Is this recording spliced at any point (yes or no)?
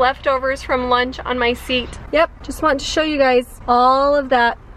no